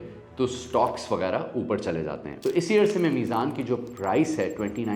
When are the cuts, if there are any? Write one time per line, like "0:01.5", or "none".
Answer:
0:02.3